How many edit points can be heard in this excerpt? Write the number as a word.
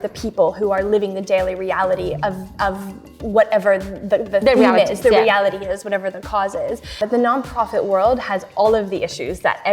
one